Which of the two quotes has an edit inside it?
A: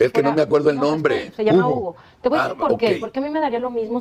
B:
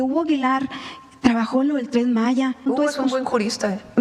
B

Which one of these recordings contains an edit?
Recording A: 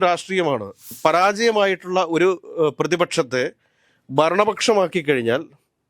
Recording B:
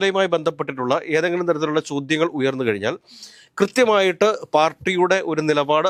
A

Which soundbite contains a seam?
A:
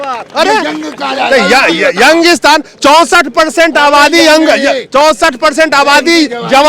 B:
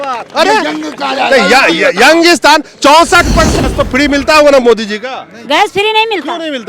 B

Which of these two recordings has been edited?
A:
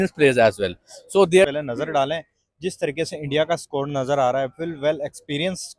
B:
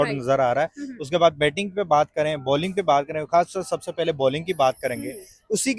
A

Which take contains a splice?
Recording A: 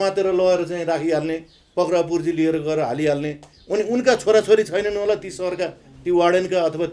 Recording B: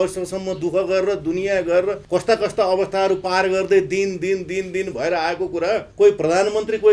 B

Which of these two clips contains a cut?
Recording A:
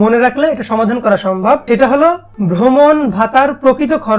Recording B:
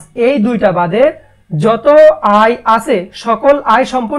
A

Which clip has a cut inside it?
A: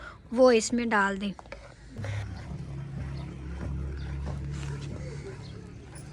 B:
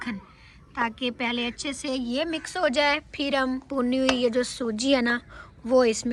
A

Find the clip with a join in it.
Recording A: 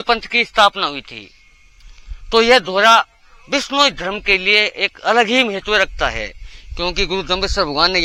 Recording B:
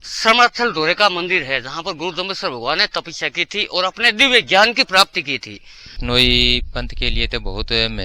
B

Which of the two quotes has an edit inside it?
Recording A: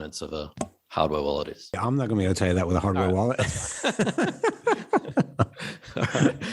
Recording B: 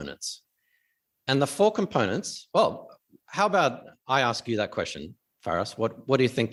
A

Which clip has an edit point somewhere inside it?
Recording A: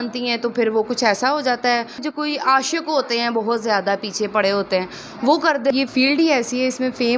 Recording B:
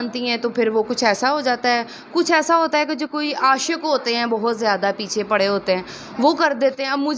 A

